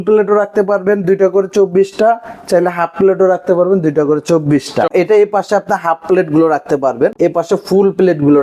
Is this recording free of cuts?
no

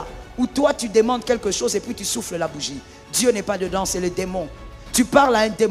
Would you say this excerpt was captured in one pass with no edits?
yes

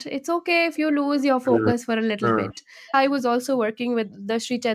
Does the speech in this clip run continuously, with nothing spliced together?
no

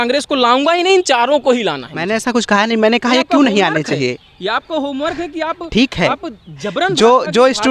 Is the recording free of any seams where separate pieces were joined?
yes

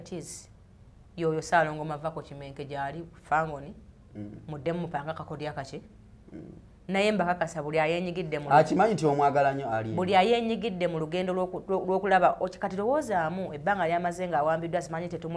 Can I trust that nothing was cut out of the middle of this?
yes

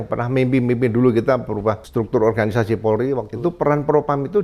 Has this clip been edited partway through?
yes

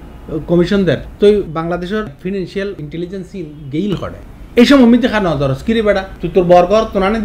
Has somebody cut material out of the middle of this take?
yes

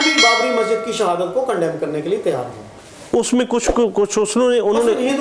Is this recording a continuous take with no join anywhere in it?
no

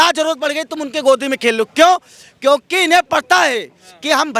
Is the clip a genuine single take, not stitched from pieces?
yes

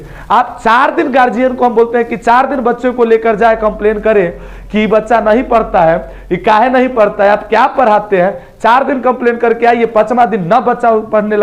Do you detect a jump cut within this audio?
no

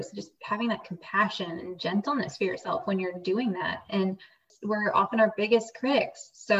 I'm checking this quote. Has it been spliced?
yes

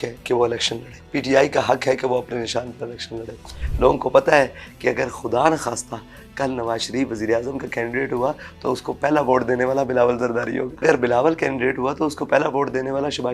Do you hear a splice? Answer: yes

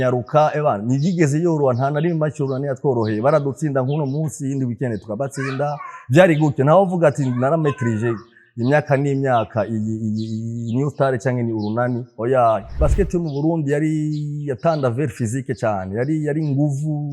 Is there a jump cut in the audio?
yes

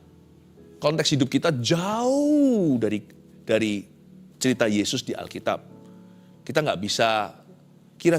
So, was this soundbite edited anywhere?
no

